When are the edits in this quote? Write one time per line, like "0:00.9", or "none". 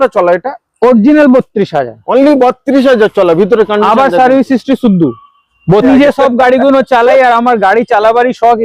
0:05.8

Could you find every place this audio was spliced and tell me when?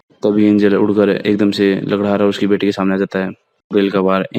none

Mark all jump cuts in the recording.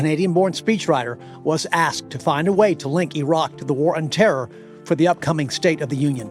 none

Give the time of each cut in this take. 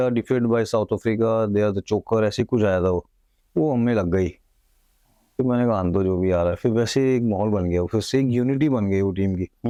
none

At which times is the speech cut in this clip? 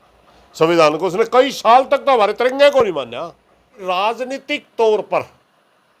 0:03.7

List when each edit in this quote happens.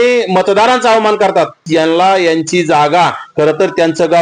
0:01.6

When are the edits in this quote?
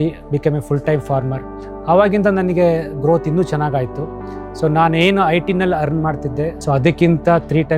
0:06.6

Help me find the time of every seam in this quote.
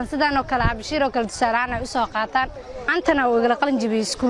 0:02.9

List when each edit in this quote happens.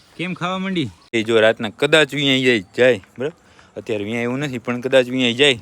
0:01.2

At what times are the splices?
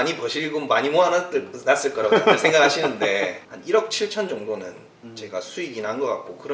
0:03.4

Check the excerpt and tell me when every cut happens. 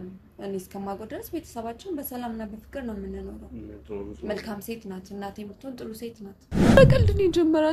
0:06.7

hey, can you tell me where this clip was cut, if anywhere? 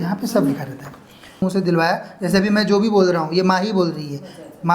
0:01.4

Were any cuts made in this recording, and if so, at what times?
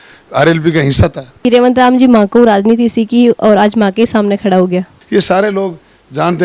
0:01.3
0:04.9

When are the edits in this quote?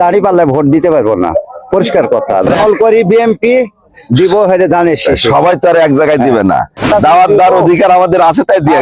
0:02.5
0:06.9

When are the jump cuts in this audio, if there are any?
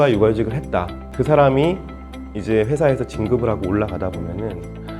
0:01.1

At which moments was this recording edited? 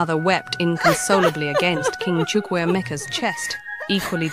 none

